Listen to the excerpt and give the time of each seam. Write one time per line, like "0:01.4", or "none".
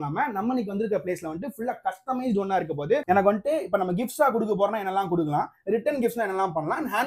0:03.0